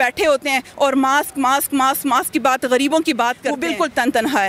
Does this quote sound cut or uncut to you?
cut